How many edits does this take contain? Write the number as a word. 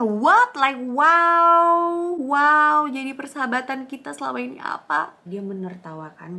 one